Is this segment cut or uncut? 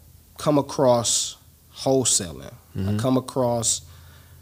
uncut